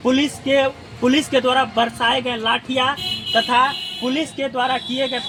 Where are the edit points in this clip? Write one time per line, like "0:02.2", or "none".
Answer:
none